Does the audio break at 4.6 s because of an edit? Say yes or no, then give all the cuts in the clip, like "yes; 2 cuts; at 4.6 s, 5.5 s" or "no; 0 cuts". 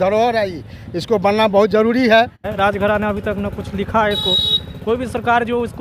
no; 1 cut; at 2.4 s